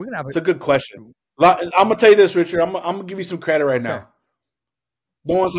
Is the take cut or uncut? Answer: uncut